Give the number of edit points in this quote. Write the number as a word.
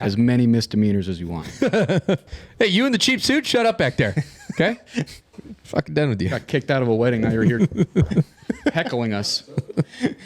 one